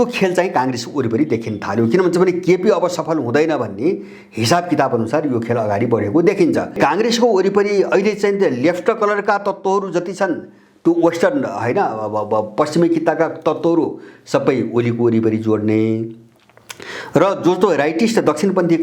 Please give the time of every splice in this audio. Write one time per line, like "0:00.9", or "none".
0:06.7